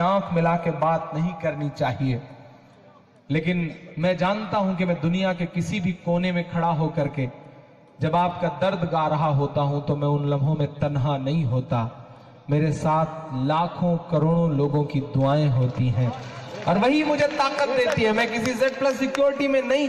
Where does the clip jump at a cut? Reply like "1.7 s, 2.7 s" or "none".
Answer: none